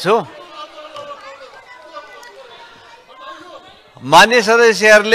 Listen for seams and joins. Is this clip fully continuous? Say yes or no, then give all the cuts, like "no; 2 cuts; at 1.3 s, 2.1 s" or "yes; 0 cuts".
yes; 0 cuts